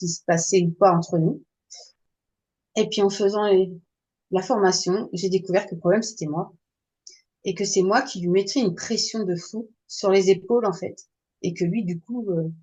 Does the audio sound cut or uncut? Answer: uncut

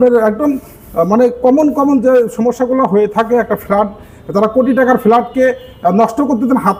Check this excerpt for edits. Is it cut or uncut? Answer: uncut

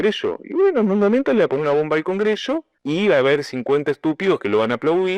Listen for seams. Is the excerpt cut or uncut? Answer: cut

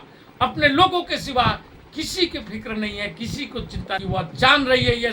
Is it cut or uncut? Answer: cut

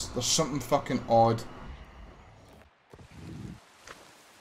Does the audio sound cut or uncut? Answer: uncut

